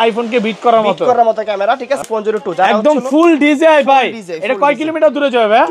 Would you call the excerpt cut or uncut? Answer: cut